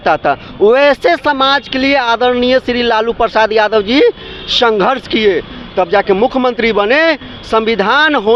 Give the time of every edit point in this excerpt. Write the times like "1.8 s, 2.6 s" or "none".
none